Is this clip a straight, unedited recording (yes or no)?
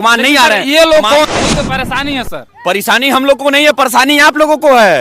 no